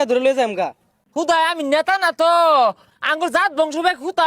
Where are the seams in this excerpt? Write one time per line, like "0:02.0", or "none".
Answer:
0:01.0